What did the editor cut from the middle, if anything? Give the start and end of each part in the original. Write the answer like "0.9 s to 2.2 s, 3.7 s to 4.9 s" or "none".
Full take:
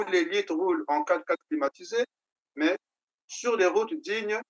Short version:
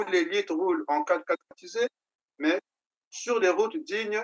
1.5 s to 1.7 s